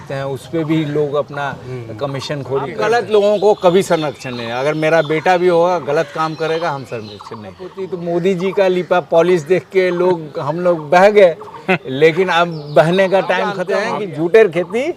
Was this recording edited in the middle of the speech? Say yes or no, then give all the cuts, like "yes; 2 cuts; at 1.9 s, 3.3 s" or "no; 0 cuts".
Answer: yes; 3 cuts; at 2.8 s, 7.7 s, 13.6 s